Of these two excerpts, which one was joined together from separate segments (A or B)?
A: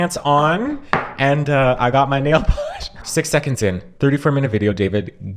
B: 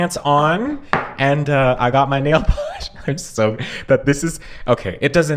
A